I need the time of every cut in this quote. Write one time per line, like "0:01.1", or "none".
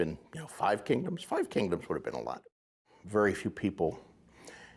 0:02.7